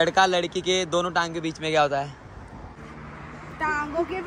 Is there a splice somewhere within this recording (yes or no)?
yes